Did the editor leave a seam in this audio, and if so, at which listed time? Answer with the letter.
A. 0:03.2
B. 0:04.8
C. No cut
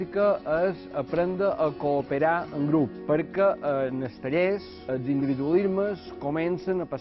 B